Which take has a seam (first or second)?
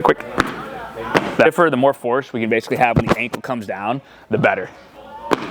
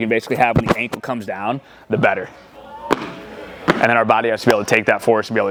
first